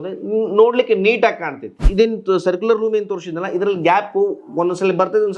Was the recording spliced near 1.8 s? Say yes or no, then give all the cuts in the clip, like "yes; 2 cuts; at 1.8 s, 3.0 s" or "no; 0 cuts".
yes; 1 cut; at 1.8 s